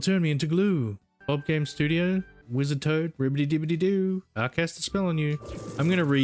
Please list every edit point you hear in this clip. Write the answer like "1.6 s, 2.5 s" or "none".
1.1 s, 2.4 s